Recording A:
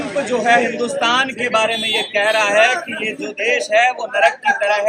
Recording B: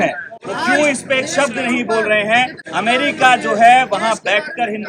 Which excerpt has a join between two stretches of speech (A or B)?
B